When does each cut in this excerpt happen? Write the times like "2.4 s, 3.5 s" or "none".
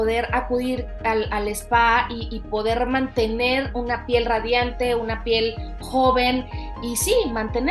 none